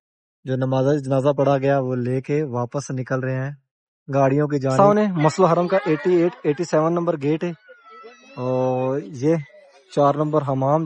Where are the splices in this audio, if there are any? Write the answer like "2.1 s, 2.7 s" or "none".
4.8 s